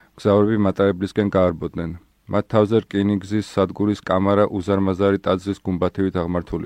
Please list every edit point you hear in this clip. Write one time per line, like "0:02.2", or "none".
0:03.5